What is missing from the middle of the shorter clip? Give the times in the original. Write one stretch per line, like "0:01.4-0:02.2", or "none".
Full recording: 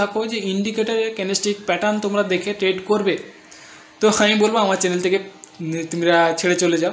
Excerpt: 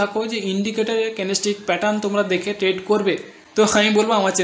0:03.3-0:03.8